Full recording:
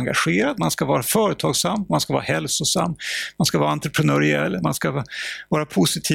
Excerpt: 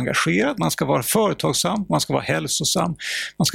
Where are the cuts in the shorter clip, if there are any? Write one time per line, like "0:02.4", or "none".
none